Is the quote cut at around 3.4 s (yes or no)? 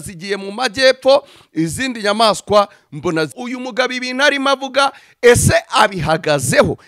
yes